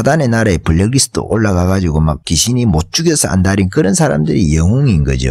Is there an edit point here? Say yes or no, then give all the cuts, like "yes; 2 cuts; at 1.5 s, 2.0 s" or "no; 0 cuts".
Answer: yes; 1 cut; at 2.3 s